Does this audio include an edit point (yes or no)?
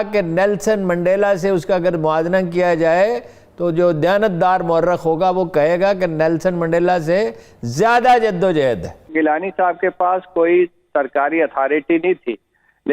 yes